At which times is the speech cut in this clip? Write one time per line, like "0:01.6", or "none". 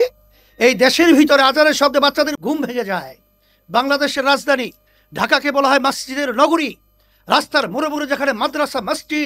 0:02.3